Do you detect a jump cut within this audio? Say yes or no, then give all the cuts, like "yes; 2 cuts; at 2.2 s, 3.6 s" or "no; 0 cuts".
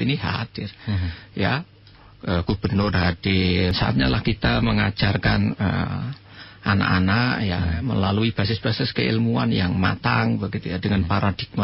yes; 1 cut; at 3.7 s